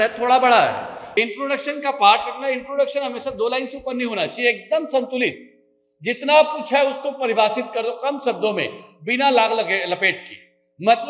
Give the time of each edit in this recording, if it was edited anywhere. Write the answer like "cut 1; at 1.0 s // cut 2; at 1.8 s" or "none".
cut 1; at 0.9 s